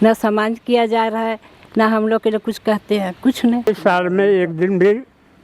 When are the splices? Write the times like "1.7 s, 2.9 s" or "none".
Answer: 3.7 s